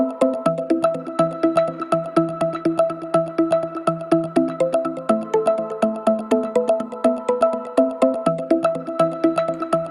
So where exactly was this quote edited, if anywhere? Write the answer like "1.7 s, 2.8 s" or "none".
none